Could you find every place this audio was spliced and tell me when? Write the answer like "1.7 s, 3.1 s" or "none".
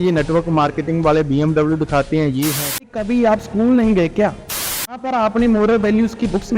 3.0 s, 4.9 s